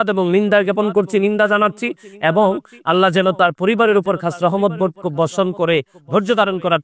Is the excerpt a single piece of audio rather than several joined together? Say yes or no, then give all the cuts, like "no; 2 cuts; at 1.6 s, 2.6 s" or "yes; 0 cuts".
yes; 0 cuts